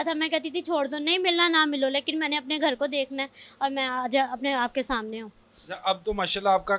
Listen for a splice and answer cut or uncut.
uncut